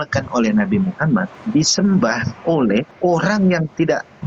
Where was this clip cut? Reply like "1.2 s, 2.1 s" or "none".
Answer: 1.4 s, 2.9 s